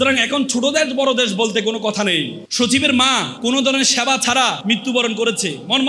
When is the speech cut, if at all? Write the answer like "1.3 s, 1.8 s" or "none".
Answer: 2.4 s, 3.3 s, 4.6 s